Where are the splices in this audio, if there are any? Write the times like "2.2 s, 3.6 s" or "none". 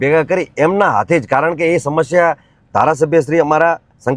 none